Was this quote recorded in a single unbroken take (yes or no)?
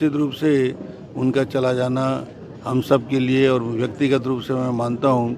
yes